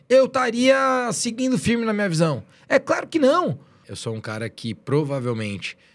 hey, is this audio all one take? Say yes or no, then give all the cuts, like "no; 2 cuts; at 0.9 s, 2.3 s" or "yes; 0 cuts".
no; 1 cut; at 3.8 s